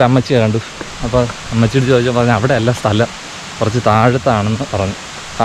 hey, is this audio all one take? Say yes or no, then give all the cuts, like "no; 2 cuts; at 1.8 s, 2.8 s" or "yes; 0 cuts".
yes; 0 cuts